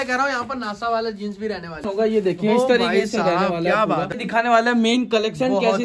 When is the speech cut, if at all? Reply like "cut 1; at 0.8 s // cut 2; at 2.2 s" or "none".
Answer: cut 1; at 1.9 s // cut 2; at 4.1 s